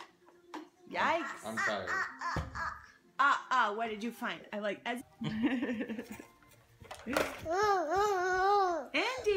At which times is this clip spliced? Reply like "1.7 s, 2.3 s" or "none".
none